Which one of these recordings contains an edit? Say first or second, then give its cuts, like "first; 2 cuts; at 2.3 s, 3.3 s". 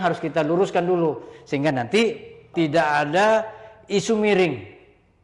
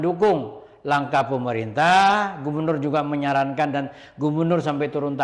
first; 1 cut; at 2.5 s